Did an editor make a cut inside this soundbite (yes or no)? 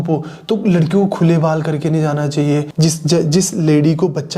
yes